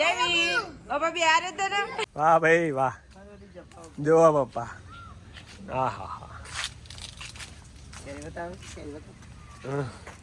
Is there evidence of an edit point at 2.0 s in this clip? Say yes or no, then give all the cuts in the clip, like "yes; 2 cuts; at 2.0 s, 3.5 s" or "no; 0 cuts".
yes; 1 cut; at 2.0 s